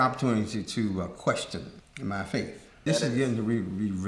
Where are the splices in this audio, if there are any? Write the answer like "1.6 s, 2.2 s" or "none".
1.8 s, 2.8 s